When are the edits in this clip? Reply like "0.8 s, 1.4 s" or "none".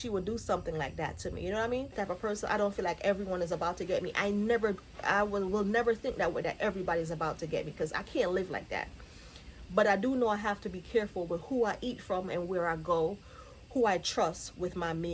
1.9 s